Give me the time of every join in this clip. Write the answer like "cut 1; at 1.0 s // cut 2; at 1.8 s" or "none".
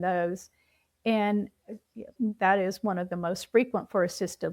cut 1; at 2.1 s